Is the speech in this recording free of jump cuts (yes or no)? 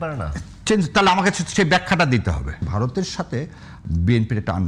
no